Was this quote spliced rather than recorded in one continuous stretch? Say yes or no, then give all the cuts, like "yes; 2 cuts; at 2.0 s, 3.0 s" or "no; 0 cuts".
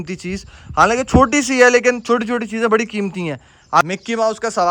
yes; 1 cut; at 3.8 s